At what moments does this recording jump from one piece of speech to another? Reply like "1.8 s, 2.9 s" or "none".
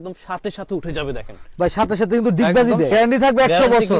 2.9 s